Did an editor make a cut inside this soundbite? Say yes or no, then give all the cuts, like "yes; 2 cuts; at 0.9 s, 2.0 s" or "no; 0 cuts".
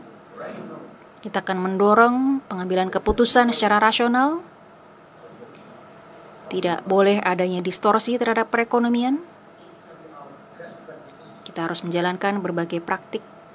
yes; 3 cuts; at 1.0 s, 5.2 s, 9.9 s